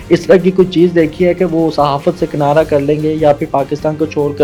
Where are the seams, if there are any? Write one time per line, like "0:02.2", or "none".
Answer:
none